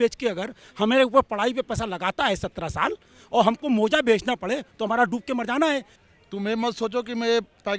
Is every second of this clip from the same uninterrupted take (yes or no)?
no